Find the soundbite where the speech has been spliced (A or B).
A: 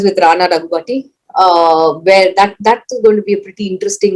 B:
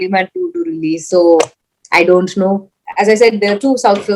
B